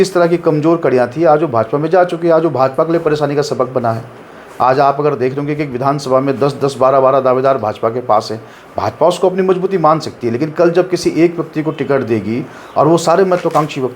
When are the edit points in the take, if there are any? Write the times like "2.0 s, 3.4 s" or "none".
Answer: none